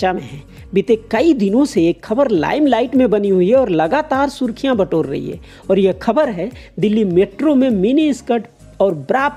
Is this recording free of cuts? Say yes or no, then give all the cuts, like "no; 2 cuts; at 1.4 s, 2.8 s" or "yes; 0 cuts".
yes; 0 cuts